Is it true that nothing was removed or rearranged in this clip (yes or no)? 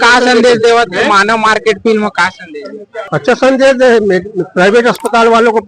no